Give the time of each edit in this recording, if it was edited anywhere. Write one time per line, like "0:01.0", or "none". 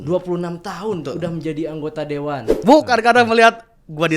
0:02.6